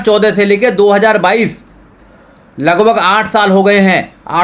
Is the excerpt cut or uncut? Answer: uncut